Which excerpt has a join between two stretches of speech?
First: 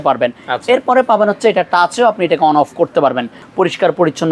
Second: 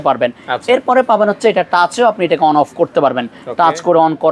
first; 1 cut; at 3.4 s

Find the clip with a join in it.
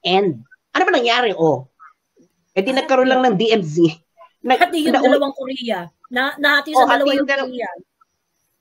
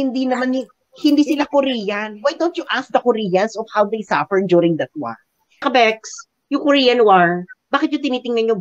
second; 1 cut; at 5.7 s

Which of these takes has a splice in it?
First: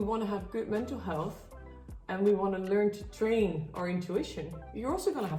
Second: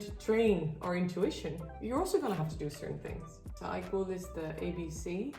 second; 1 cut; at 3.4 s

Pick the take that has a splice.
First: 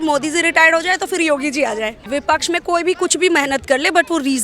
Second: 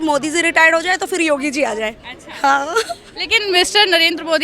first; 1 cut; at 2.1 s

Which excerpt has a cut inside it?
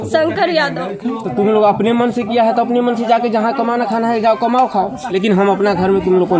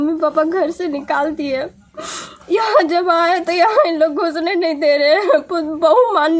first; 2 cuts; at 1.2 s, 5.0 s

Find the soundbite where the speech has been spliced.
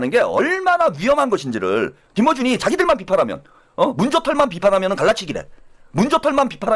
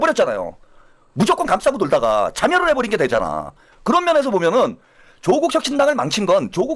first; 1 cut; at 2.0 s

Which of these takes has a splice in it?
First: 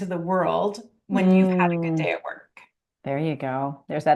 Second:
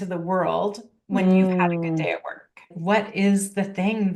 second; 1 cut; at 2.7 s

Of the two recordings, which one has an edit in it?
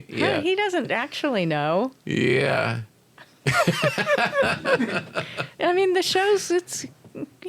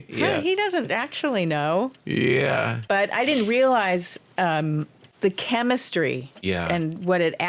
second; 3 cuts; at 2.8 s, 5.0 s, 6.3 s

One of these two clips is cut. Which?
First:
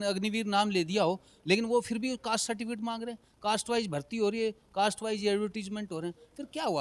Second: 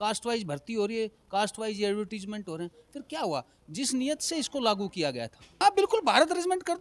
second; 1 cut; at 5.6 s

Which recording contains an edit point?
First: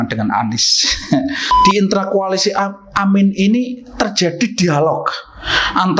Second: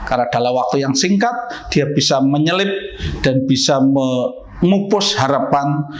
first; 1 cut; at 1.5 s

